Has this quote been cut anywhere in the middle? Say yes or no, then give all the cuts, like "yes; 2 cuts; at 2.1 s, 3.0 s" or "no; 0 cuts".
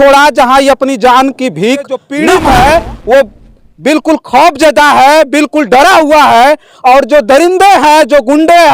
yes; 1 cut; at 2.0 s